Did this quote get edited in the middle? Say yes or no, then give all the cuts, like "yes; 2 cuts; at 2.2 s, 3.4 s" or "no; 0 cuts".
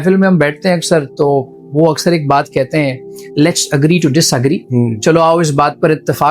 no; 0 cuts